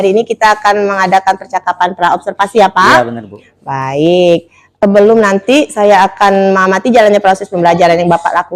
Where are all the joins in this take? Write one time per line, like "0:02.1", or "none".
0:04.6